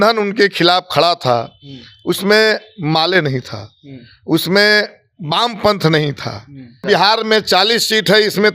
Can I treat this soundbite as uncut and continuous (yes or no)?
no